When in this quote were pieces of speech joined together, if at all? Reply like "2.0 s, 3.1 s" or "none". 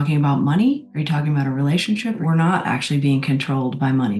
0.9 s, 2.2 s